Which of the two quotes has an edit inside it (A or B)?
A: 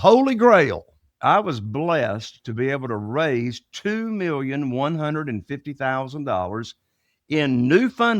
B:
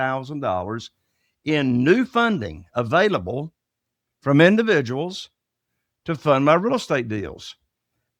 A